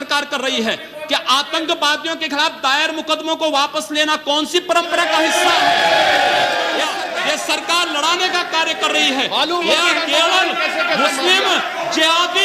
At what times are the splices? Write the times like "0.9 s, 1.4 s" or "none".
6.9 s